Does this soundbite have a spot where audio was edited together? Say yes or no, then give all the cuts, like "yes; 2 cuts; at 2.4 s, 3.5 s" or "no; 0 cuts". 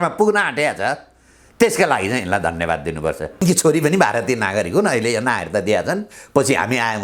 yes; 1 cut; at 3.4 s